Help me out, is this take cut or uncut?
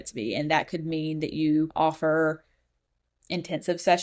cut